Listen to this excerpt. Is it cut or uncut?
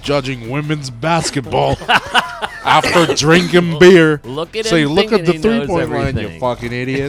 uncut